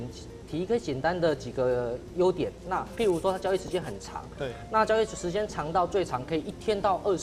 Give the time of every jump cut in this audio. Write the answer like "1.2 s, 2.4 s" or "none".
none